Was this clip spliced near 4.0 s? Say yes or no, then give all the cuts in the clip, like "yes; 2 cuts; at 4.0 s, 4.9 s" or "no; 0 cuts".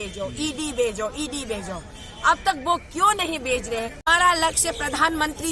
yes; 1 cut; at 4.0 s